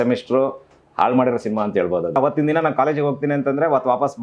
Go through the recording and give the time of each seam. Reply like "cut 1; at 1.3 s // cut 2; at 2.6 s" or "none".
cut 1; at 2.2 s